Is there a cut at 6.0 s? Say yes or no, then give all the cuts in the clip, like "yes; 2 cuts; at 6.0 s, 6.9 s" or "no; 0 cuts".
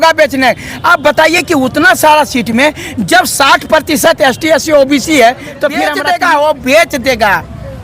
yes; 1 cut; at 6.0 s